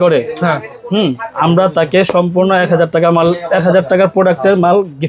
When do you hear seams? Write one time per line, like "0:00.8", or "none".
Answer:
none